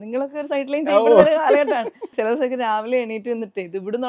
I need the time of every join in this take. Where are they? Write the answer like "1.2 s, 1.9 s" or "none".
2.1 s